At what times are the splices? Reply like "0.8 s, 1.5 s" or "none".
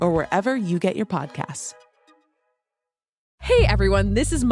1.6 s, 3.3 s